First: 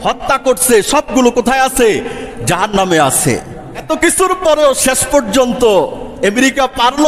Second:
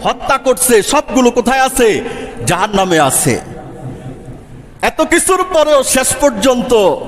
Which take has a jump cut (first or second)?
first